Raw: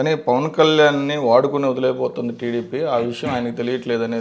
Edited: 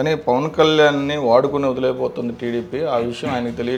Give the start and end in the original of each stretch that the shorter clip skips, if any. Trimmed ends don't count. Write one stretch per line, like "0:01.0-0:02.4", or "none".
none

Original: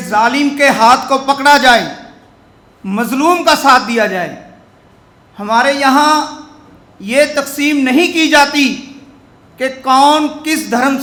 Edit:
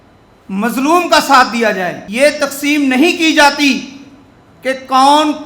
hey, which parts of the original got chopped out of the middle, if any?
0:04.4-0:07.0

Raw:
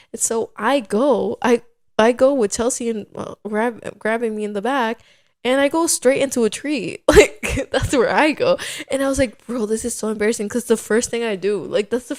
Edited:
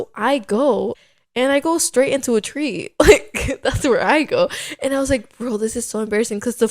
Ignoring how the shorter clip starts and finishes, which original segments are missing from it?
0:01.4-0:05.0

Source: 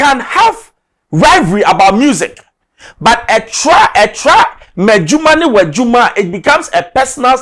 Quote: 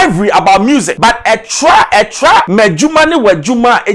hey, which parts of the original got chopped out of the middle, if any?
0:02.2-0:02.9
0:04.5-0:04.8

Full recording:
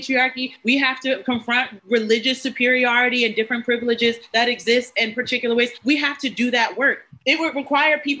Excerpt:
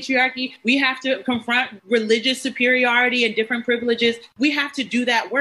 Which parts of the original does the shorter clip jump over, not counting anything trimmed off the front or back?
0:04.3-0:05.7

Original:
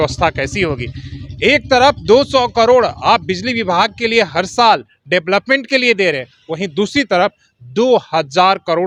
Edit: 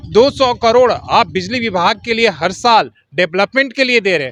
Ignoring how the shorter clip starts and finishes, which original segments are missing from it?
none

